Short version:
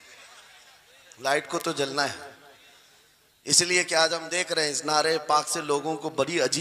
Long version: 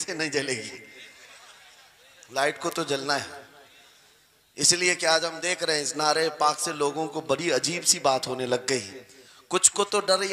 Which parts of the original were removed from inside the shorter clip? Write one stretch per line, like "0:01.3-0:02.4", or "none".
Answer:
none